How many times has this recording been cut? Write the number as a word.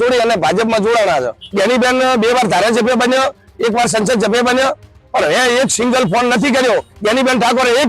two